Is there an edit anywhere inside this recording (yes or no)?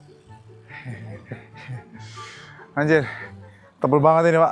no